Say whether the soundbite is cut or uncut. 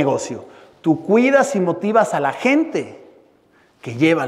uncut